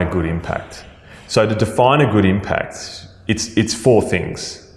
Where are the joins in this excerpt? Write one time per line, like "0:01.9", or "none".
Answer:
none

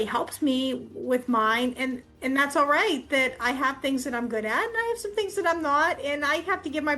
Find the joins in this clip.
none

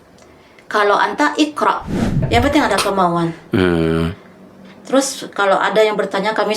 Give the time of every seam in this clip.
0:02.2

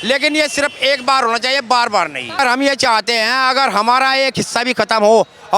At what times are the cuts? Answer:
0:02.4

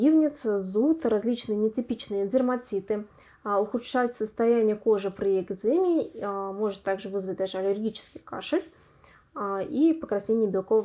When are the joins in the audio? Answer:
none

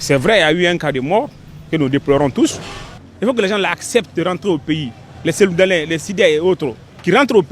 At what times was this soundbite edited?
0:02.8

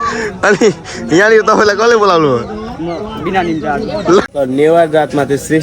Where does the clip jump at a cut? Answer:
0:04.3

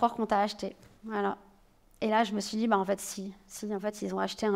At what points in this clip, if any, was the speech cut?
none

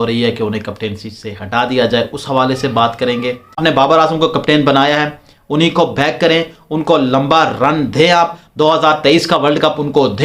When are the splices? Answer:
0:03.6

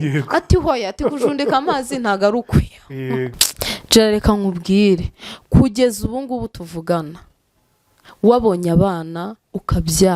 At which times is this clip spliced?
0:03.4

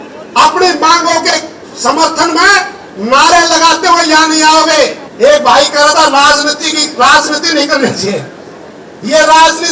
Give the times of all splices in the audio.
0:05.0

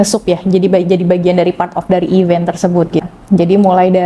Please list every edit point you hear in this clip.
0:03.1

